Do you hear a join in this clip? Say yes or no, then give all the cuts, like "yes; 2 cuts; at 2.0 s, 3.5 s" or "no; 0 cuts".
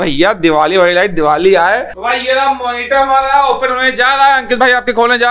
yes; 1 cut; at 2.0 s